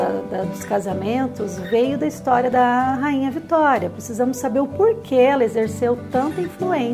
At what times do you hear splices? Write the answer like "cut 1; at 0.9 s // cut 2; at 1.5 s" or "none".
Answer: cut 1; at 2.5 s